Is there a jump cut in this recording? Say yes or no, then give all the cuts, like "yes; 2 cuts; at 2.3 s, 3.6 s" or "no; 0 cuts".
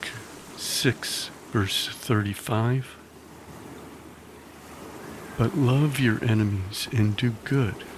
yes; 2 cuts; at 2.9 s, 4.9 s